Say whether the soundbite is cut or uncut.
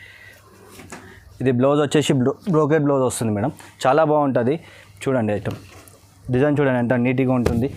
uncut